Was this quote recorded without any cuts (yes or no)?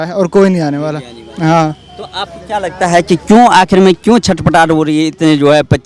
yes